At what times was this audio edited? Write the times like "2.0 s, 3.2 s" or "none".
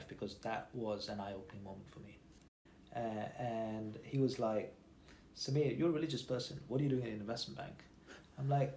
2.7 s